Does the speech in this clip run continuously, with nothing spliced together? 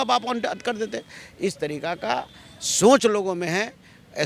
yes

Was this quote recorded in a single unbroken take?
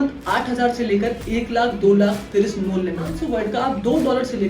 no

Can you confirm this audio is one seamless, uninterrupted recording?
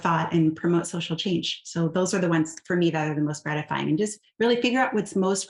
yes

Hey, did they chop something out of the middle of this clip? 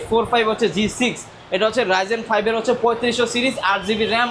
no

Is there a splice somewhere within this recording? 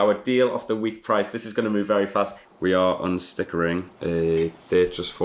yes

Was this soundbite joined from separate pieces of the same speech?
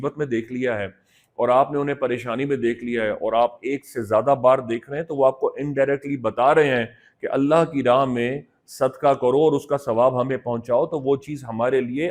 no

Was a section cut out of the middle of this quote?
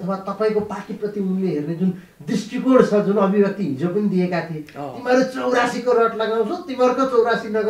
no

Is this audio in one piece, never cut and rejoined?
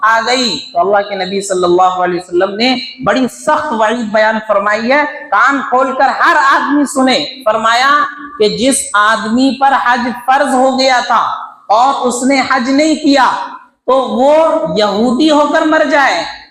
yes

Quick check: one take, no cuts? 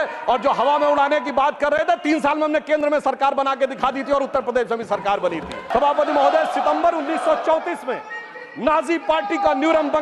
no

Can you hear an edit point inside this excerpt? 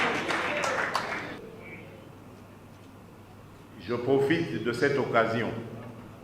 yes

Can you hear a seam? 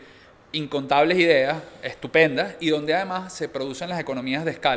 no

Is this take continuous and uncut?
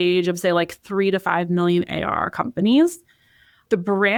yes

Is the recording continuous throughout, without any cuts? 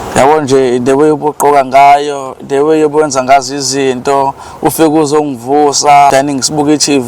no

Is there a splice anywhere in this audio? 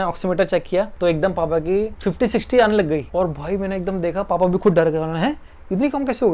yes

